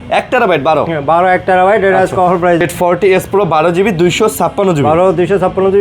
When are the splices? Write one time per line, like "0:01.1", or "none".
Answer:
0:02.6